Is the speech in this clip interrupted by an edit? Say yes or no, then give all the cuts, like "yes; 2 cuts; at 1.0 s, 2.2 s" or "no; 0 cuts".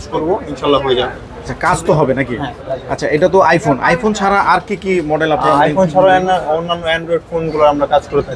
no; 0 cuts